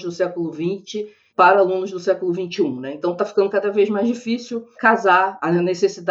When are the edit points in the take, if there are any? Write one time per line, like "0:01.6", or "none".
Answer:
none